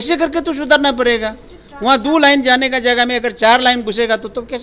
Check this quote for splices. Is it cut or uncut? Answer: uncut